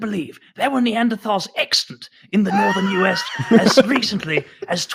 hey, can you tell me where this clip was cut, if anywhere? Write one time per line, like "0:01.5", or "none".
none